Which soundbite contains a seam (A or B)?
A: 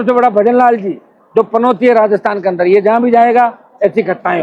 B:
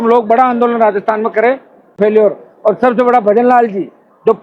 B